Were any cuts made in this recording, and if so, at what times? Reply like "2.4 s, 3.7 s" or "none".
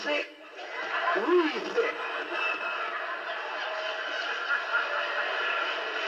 2.3 s